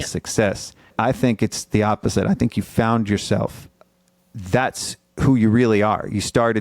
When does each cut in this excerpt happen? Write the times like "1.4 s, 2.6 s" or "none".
0.9 s, 3.8 s